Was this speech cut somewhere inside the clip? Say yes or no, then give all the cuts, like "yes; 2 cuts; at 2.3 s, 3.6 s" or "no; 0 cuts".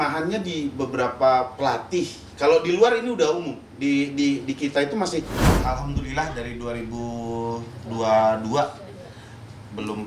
yes; 1 cut; at 5.5 s